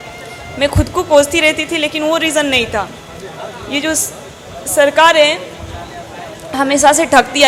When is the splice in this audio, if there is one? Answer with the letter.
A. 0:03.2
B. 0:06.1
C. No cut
C